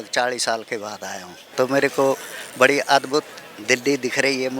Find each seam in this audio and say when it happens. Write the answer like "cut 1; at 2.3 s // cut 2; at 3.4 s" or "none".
cut 1; at 1.5 s

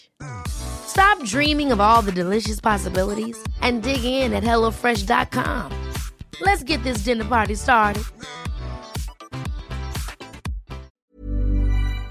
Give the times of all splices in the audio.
cut 1; at 10.9 s

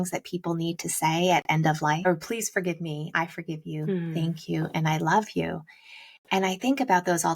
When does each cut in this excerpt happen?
cut 1; at 2.1 s

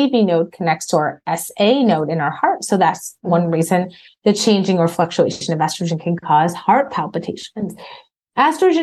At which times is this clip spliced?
none

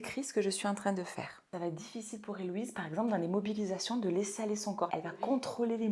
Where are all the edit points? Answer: cut 1; at 1.4 s // cut 2; at 4.9 s

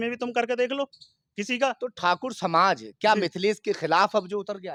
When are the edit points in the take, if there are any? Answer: none

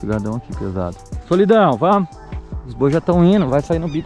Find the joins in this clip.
cut 1; at 1.0 s

